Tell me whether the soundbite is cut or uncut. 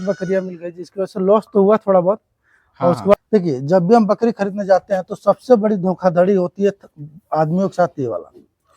cut